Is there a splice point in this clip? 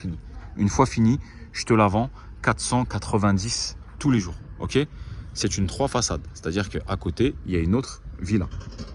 no; 0 cuts

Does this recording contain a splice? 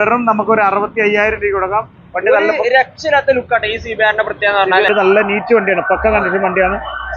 yes; 1 cut; at 4.9 s

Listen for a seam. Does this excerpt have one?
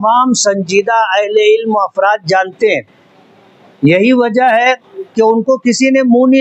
no; 0 cuts

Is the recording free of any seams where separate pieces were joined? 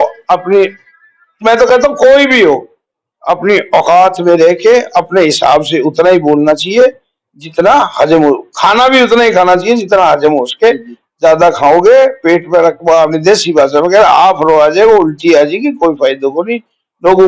yes; 0 cuts

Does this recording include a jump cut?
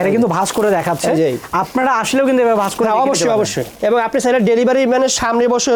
no; 0 cuts

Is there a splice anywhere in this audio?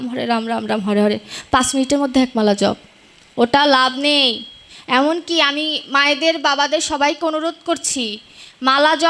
no; 0 cuts

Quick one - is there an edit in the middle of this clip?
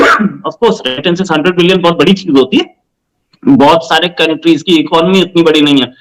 no; 0 cuts

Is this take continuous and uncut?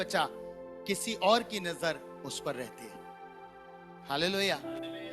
yes; 0 cuts

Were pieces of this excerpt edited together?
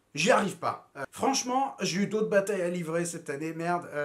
yes; 1 cut; at 0.9 s

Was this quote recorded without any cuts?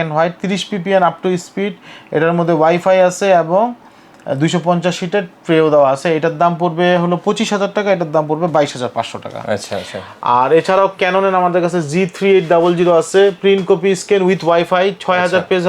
yes; 0 cuts

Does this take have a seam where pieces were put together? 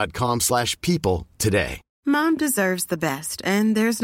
yes; 1 cut; at 1.8 s

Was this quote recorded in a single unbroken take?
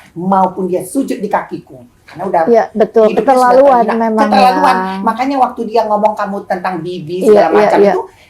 yes; 0 cuts

